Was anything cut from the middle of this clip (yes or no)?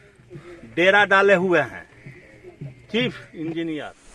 no